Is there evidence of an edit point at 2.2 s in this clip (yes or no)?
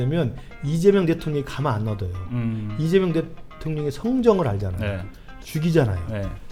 no